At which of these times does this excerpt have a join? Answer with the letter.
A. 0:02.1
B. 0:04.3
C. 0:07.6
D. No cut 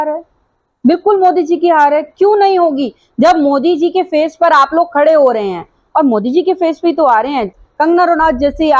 D